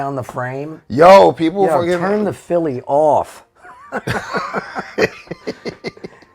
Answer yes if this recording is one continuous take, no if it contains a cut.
yes